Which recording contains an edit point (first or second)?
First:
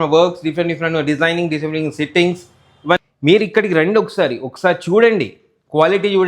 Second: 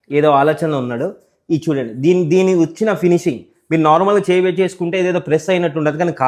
first